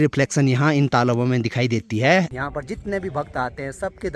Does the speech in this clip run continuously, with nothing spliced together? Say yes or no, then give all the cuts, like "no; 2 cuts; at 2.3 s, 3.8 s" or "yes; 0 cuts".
no; 1 cut; at 2.3 s